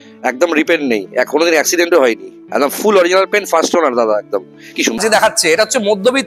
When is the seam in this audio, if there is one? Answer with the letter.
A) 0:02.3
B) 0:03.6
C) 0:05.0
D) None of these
C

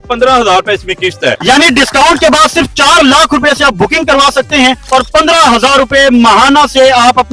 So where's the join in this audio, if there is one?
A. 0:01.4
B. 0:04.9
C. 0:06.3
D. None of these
A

